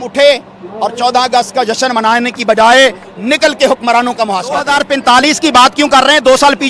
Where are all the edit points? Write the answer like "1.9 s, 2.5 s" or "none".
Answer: 4.6 s